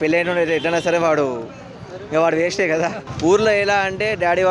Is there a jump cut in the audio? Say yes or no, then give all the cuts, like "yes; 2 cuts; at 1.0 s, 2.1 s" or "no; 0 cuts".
yes; 1 cut; at 3.0 s